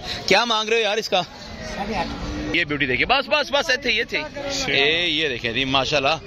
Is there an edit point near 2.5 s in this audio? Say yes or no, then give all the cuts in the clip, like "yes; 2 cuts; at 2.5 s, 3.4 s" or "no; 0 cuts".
yes; 1 cut; at 2.5 s